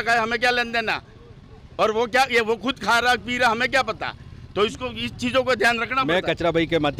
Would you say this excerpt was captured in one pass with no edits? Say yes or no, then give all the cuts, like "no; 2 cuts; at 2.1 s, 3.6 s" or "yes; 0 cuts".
yes; 0 cuts